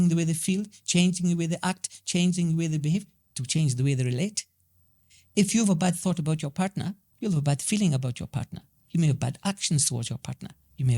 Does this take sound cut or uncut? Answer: cut